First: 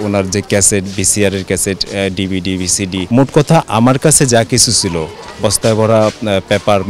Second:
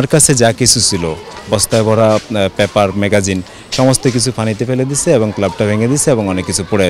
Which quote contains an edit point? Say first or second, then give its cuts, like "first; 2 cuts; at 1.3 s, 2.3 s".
first; 1 cut; at 3.0 s